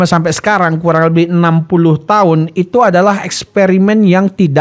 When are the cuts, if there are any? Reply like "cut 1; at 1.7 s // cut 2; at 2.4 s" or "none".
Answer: none